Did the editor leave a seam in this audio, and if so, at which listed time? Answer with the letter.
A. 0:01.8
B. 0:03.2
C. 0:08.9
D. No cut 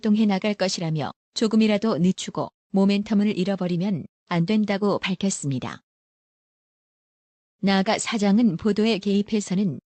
C